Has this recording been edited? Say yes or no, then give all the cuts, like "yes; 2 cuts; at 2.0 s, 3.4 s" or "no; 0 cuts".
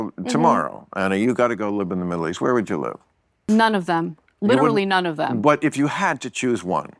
yes; 1 cut; at 3.4 s